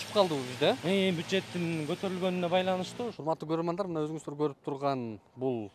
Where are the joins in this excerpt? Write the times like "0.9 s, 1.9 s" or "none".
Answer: 3.2 s